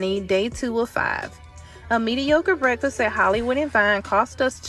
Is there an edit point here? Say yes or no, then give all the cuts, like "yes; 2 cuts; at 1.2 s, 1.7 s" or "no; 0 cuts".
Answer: no; 0 cuts